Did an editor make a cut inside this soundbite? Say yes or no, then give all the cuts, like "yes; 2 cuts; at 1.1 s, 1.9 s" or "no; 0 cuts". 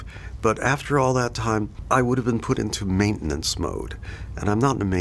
yes; 1 cut; at 1.8 s